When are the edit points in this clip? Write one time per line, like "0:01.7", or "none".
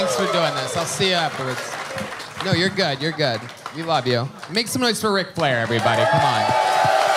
none